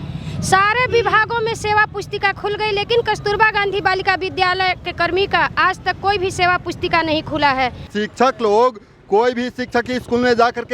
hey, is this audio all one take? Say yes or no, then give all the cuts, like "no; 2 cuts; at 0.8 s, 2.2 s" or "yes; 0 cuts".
no; 1 cut; at 7.9 s